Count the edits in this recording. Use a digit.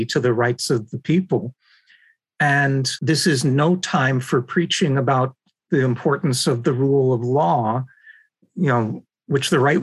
1